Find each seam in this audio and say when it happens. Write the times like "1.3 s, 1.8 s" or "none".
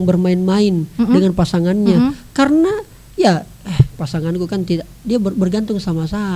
none